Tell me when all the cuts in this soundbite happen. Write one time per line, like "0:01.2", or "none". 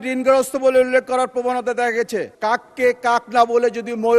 0:02.3